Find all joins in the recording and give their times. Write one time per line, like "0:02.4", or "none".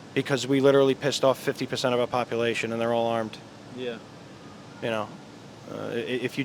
none